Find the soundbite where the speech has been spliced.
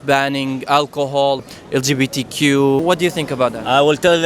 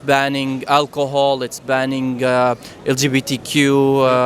first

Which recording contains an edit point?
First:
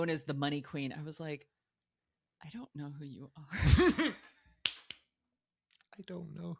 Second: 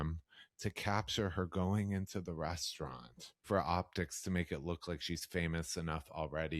second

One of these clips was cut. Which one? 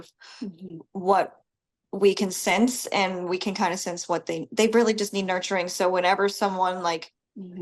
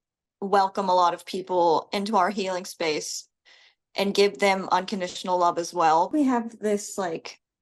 second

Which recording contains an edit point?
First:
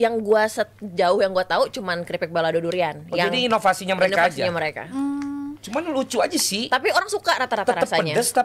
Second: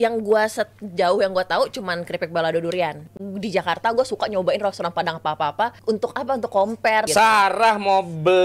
second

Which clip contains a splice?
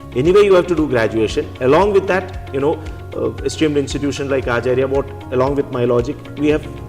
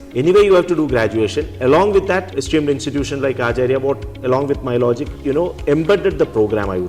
second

